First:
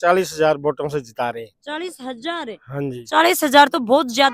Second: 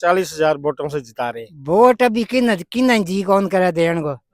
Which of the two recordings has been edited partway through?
second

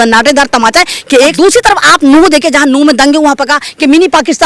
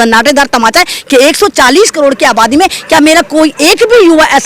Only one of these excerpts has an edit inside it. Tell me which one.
first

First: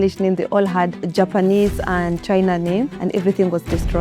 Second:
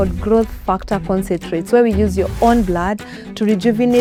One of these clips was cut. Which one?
first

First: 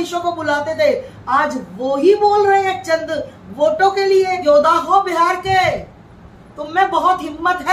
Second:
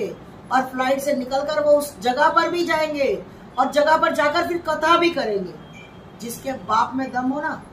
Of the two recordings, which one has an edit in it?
first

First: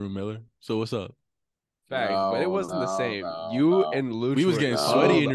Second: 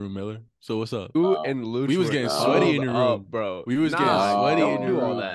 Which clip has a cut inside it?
second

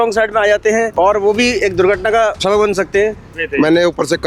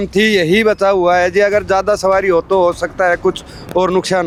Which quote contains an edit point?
first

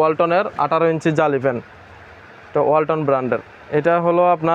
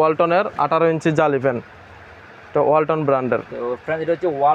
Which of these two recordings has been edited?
first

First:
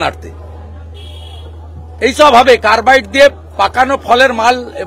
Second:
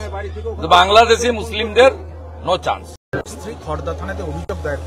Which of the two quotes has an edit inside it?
second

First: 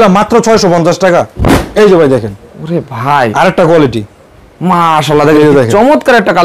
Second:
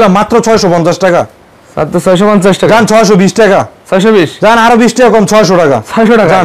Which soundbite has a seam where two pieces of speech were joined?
first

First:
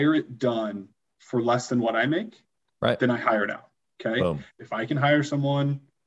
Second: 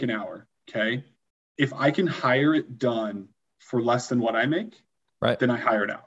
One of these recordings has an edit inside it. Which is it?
first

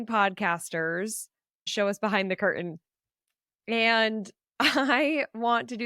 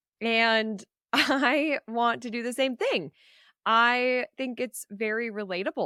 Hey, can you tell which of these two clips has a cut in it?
first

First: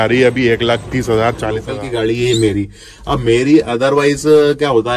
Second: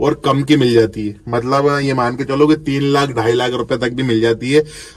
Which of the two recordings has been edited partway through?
first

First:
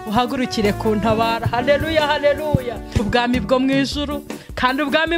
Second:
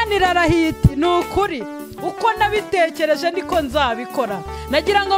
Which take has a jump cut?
first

